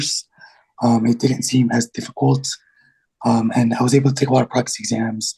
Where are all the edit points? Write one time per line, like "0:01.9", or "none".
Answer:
none

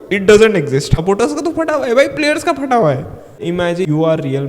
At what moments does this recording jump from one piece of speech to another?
0:00.9

